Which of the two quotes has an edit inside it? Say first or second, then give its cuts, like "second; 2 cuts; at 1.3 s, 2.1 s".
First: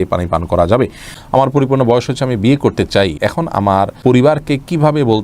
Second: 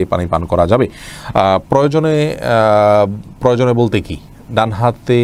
first; 2 cuts; at 1.1 s, 3.6 s